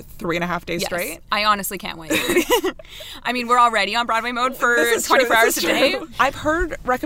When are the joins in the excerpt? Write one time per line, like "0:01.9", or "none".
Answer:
none